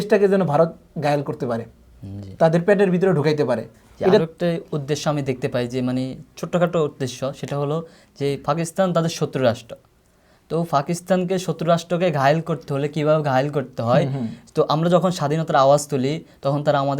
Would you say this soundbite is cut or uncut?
cut